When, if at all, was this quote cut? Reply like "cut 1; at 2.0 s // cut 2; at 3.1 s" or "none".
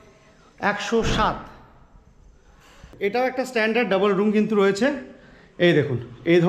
cut 1; at 2.9 s